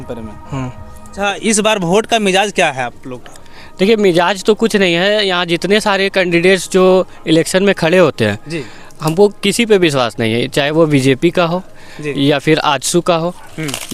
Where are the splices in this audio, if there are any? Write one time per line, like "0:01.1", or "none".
0:01.2